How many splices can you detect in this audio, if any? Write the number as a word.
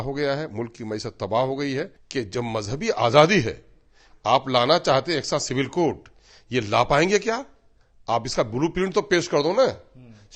one